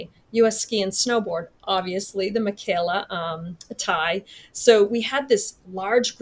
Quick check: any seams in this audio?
no; 0 cuts

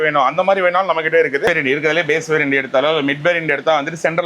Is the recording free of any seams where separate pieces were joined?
no; 1 cut; at 1.5 s

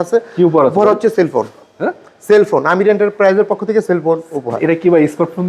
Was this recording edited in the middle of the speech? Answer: no; 0 cuts

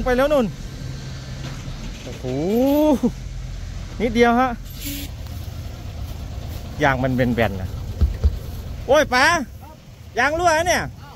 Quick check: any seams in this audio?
yes; 1 cut; at 5.1 s

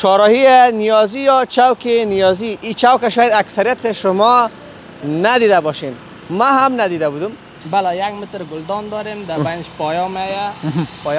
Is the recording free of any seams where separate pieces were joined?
no; 1 cut; at 7.6 s

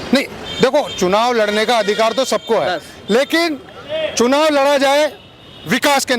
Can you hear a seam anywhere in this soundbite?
no; 0 cuts

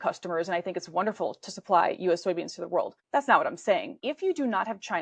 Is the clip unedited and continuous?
no; 2 cuts; at 3.0 s, 4.0 s

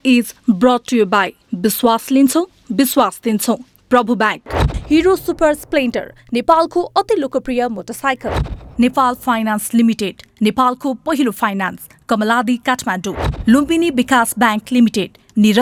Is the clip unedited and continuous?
yes; 0 cuts

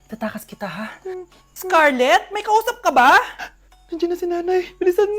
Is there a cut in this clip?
yes; 1 cut; at 1.7 s

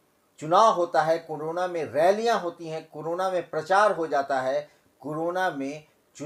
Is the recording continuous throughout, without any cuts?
yes; 0 cuts

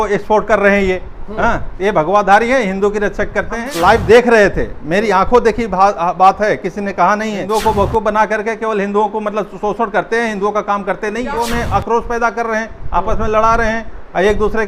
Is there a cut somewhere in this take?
yes; 3 cuts; at 3.7 s, 7.5 s, 11.3 s

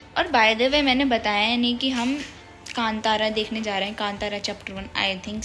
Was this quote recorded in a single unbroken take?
yes; 0 cuts

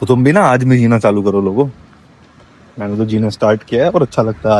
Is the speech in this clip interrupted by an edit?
no; 0 cuts

